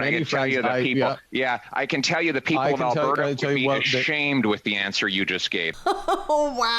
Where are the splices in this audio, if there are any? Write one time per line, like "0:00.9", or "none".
0:05.8